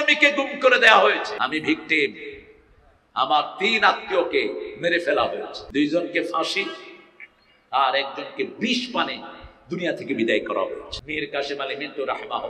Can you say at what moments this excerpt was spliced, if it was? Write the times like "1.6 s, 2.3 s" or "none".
1.3 s, 5.6 s, 10.9 s